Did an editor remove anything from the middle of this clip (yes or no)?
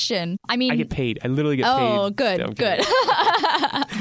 no